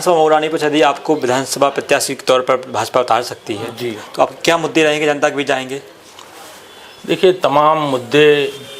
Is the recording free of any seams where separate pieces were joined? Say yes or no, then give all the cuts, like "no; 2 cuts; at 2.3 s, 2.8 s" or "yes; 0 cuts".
yes; 0 cuts